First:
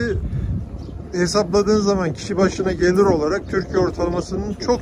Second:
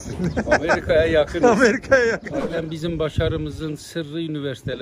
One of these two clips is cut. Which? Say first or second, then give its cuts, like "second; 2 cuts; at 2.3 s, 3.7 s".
second; 1 cut; at 2.6 s